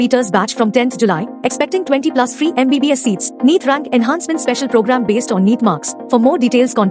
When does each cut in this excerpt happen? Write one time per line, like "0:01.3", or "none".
none